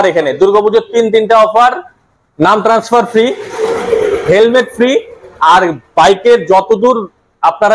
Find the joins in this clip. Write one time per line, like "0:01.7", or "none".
none

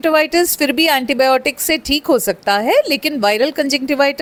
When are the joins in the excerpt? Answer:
none

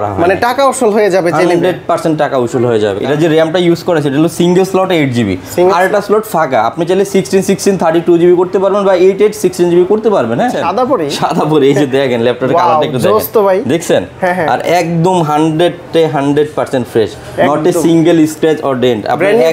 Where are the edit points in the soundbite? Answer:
0:03.0
0:10.6

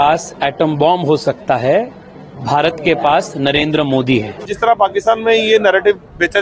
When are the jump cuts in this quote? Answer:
0:04.4

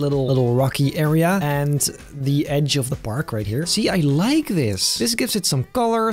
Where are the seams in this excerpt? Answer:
0:03.7

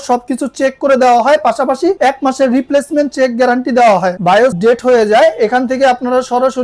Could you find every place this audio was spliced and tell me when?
0:04.2

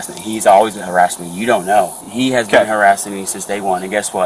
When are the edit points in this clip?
0:02.0

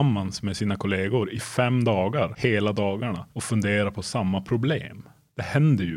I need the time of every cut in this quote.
0:02.3
0:03.3

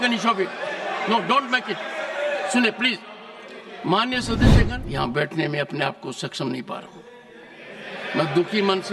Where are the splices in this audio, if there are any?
0:04.6

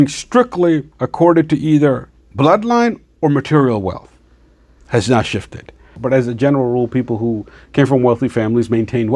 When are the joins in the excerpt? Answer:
0:01.0
0:06.0

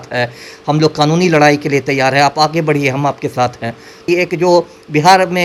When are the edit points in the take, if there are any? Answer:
0:04.0

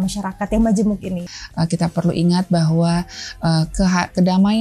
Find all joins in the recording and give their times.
0:01.2

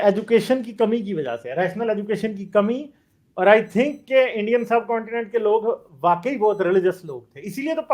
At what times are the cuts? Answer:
none

